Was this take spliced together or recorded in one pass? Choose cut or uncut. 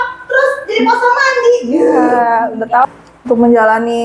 cut